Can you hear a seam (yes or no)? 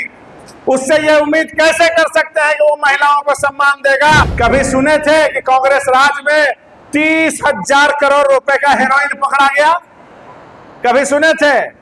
yes